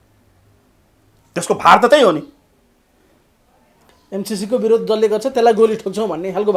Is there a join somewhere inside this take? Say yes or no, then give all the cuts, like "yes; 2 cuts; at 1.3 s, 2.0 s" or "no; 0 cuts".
no; 0 cuts